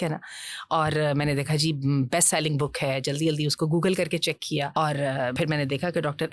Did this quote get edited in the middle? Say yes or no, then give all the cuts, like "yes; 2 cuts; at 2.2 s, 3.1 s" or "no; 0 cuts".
yes; 2 cuts; at 4.7 s, 5.3 s